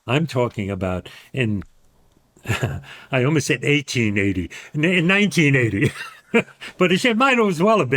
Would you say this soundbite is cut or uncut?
uncut